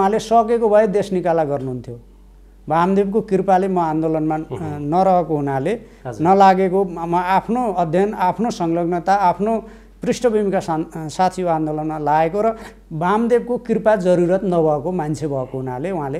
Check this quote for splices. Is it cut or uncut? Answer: uncut